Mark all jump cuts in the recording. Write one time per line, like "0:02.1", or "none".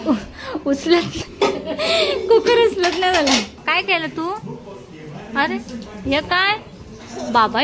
0:03.5